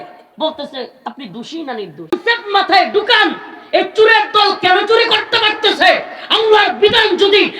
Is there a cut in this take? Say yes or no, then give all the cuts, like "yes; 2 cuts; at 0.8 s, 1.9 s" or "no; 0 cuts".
yes; 1 cut; at 2.1 s